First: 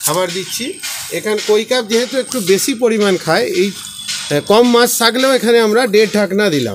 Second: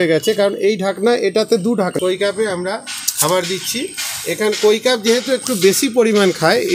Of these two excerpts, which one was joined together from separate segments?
second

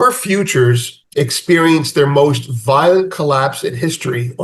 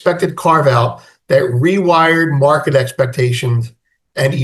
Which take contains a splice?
first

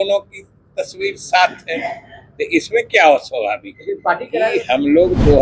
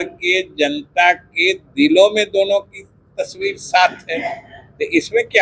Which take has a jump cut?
first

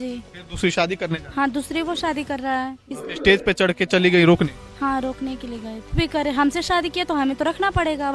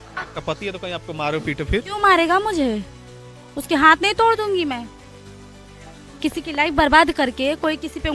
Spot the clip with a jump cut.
first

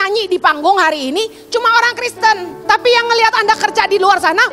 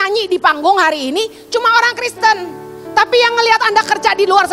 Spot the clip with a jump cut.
first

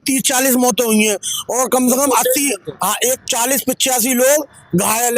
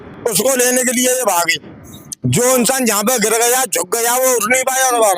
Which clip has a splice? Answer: first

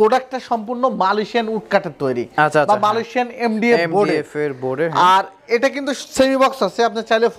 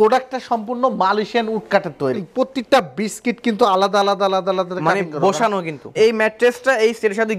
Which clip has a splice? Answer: second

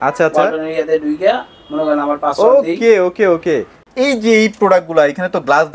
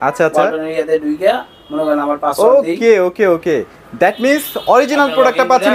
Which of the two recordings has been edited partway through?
first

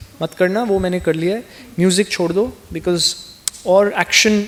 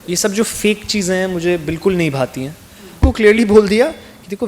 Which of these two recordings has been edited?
second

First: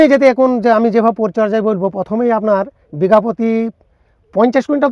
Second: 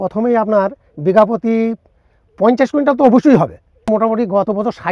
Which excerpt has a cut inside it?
second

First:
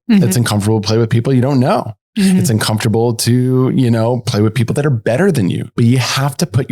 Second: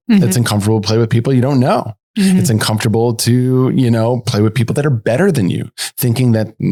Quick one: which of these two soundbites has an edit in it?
first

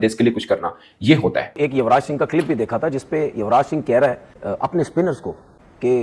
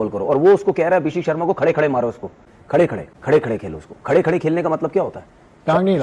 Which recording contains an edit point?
first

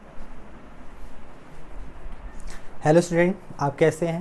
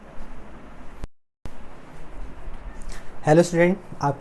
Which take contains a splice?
first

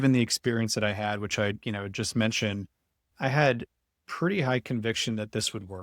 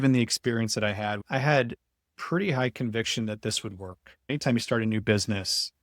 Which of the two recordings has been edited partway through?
second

